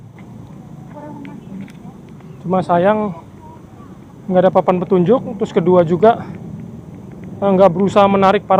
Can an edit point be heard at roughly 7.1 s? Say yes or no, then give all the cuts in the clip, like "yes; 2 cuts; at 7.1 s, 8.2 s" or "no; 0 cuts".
no; 0 cuts